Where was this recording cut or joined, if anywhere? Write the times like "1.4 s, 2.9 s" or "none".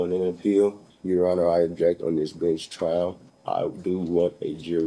0.9 s, 3.3 s